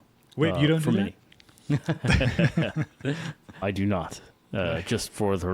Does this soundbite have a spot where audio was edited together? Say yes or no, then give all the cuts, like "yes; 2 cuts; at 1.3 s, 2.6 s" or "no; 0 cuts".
no; 0 cuts